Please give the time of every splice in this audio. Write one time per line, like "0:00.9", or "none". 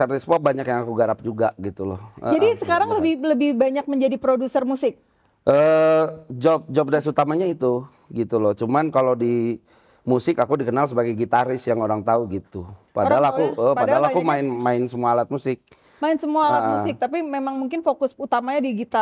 none